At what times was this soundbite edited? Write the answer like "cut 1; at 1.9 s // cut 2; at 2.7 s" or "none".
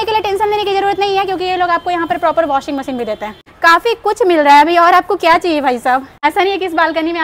none